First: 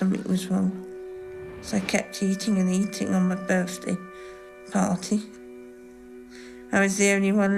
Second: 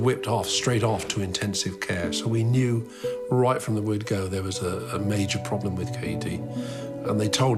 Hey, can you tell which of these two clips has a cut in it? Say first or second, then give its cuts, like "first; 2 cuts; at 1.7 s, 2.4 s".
first; 1 cut; at 4.7 s